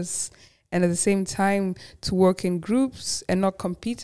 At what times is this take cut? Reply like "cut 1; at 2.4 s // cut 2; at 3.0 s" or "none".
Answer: none